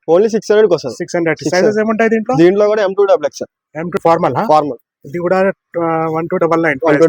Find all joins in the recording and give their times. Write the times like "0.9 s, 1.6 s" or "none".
4.0 s